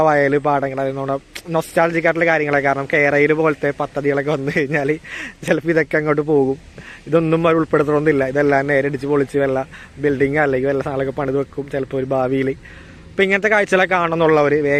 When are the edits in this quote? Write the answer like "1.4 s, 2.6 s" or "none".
none